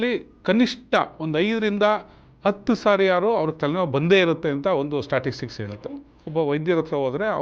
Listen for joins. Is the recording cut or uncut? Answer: cut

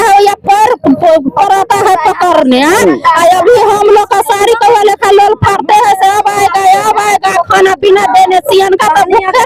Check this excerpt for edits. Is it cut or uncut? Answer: uncut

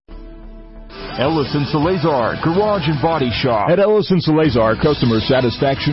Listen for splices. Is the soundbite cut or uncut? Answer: cut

